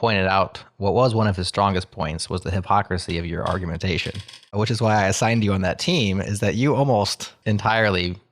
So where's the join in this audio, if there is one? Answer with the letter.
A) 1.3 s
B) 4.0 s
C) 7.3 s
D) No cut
C